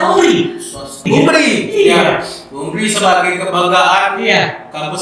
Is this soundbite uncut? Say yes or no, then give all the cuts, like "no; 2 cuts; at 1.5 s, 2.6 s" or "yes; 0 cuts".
no; 1 cut; at 1.0 s